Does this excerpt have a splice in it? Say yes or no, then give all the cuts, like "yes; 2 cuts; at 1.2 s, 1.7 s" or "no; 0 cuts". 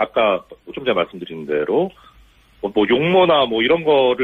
no; 0 cuts